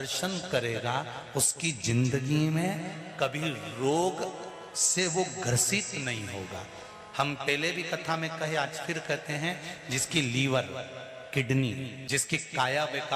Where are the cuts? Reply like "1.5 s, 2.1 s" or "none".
11.9 s